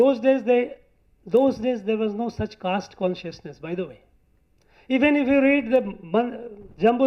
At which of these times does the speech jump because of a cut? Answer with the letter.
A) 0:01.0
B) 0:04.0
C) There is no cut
C